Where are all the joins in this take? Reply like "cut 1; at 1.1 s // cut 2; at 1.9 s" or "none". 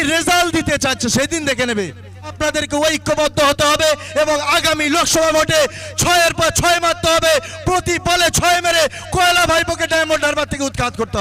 cut 1; at 2.4 s